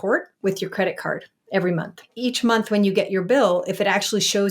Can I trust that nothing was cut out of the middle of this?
no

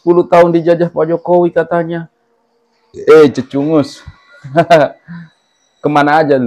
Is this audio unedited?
yes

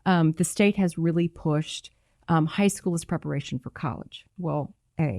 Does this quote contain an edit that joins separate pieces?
yes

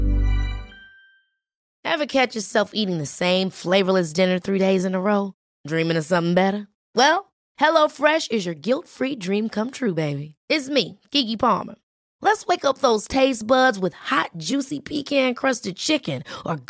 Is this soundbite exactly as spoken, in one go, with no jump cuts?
no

